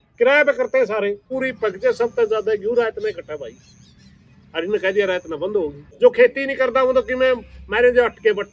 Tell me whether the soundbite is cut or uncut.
cut